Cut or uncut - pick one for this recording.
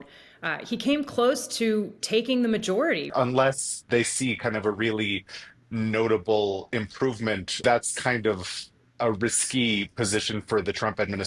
cut